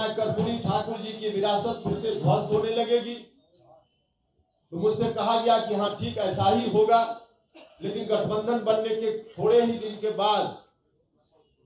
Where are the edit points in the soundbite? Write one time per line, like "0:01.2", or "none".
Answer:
none